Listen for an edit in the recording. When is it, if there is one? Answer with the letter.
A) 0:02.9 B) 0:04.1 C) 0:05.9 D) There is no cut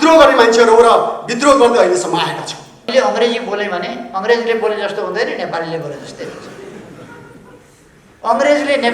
A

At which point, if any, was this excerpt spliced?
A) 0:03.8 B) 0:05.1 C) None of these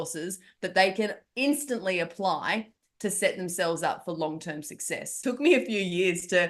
B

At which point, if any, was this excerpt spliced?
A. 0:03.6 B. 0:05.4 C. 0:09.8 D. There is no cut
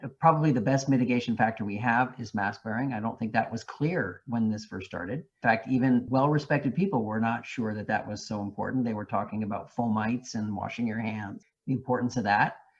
D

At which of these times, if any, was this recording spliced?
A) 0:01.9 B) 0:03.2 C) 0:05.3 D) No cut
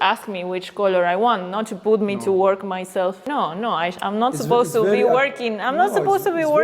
B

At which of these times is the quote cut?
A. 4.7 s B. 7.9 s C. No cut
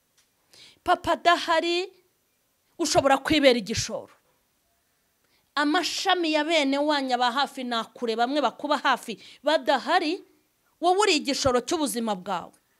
C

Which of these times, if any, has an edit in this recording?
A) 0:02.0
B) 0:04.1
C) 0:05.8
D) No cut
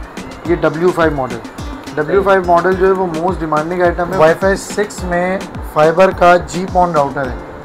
B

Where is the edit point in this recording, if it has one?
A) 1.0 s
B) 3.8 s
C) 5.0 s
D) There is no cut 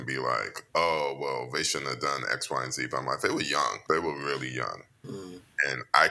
B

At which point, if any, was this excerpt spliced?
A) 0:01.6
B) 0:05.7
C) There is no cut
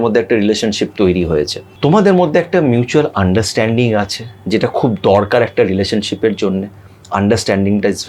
A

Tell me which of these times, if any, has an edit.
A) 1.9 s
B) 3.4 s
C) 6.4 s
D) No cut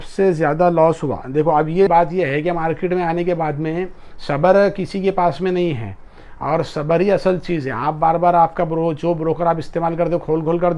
A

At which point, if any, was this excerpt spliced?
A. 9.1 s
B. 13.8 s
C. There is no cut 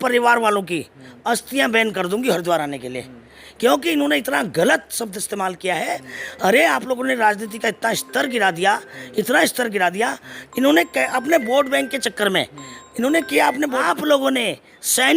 B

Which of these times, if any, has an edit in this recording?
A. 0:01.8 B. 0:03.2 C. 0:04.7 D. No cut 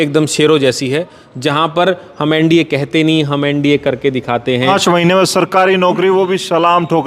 C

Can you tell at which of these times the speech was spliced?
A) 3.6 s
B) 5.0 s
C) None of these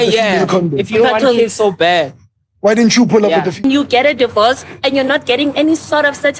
A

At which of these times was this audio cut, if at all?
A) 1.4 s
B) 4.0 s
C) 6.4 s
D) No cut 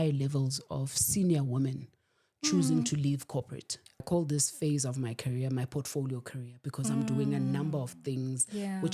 B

